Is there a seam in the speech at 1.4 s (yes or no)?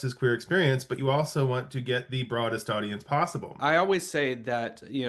no